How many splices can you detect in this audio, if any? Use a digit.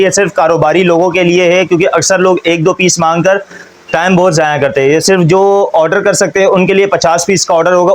0